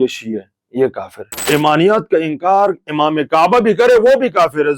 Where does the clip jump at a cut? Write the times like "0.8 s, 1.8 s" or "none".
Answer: 1.5 s